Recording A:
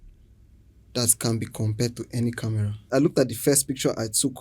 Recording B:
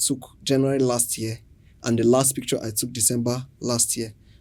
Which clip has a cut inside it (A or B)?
A